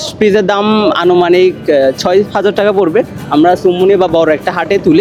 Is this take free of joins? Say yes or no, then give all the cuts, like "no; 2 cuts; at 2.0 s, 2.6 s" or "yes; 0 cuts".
yes; 0 cuts